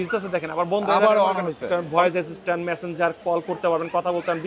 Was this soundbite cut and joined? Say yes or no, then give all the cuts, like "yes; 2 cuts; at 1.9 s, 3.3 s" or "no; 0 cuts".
yes; 1 cut; at 1.7 s